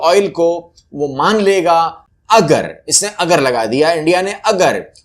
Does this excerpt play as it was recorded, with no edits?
no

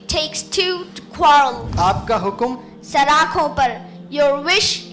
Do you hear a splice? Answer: yes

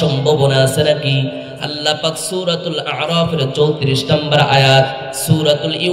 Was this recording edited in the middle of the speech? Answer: no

